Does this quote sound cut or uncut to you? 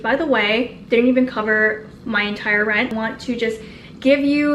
cut